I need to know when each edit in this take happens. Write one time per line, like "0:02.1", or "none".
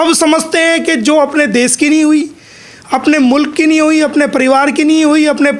none